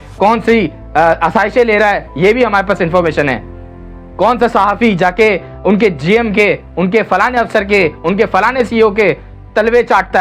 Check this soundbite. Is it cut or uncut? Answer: uncut